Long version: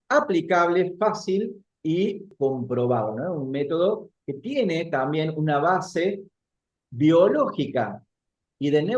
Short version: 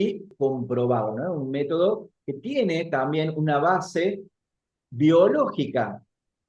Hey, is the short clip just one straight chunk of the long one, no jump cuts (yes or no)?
yes